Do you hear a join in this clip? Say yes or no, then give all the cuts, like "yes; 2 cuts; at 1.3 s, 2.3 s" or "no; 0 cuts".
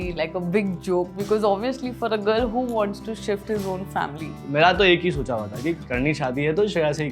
yes; 1 cut; at 4.3 s